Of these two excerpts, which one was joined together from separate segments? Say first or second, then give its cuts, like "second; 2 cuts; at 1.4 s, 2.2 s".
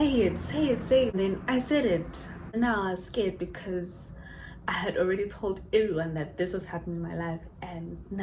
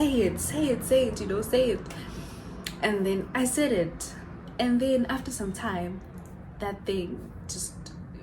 first; 2 cuts; at 1.1 s, 2.5 s